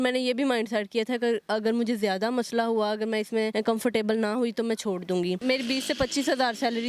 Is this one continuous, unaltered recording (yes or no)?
no